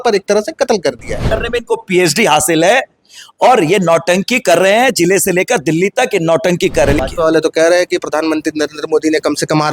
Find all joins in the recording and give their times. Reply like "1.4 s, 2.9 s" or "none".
1.2 s, 7.0 s